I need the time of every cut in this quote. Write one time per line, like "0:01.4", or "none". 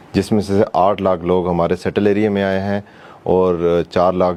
none